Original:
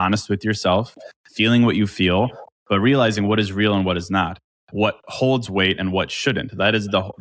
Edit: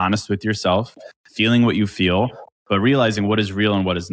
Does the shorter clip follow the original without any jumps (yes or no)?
yes